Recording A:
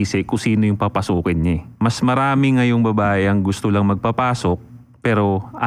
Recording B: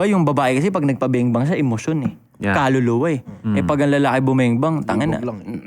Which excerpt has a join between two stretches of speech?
A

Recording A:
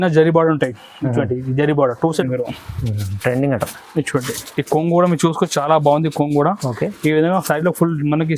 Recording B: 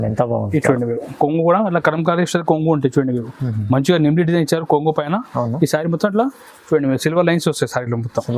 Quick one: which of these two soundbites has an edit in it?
A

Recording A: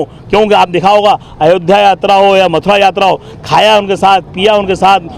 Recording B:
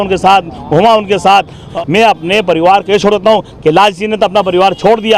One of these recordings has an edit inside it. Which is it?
B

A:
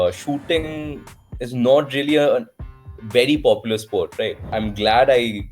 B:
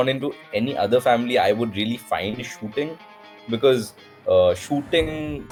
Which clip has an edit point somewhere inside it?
A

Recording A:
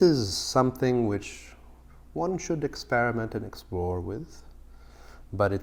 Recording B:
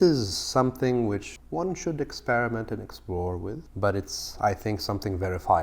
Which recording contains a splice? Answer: B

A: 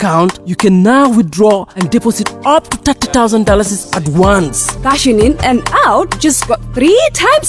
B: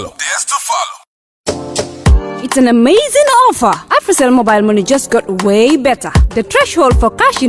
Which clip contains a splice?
B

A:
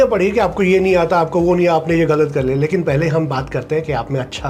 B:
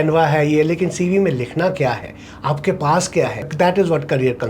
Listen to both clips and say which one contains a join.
B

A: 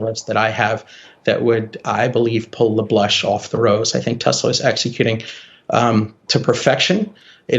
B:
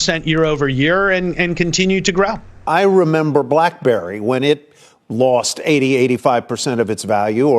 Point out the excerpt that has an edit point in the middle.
B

